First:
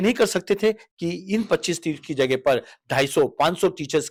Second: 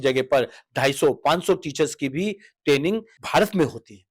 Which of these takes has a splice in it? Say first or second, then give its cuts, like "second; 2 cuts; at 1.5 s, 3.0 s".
second; 1 cut; at 3.1 s